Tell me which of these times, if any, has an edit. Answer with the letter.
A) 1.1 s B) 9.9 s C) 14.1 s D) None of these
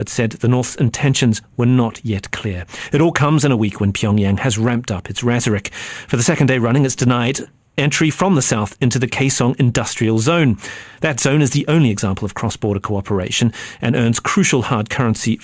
B